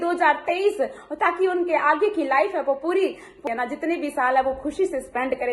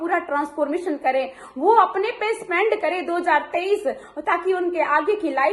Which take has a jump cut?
first; 1 cut; at 3.4 s

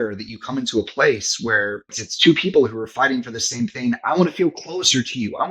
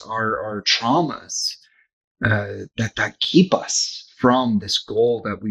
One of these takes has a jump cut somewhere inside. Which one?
first; 1 cut; at 2.0 s

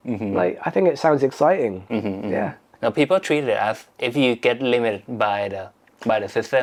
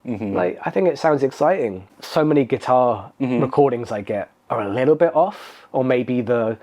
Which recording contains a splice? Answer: second; 1 cut; at 1.9 s

